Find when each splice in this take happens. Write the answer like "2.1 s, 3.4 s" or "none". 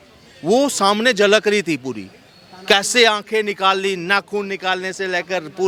none